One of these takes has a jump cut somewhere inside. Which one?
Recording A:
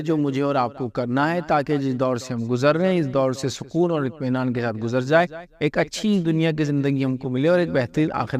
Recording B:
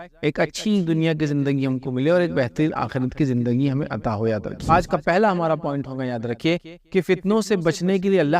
B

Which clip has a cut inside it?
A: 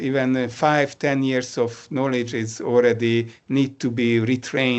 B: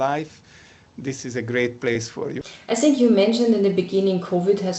B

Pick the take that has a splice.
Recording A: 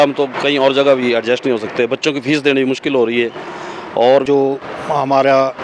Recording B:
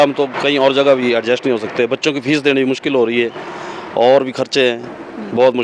A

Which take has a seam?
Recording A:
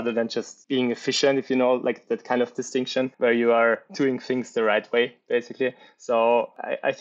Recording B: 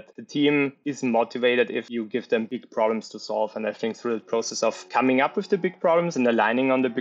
A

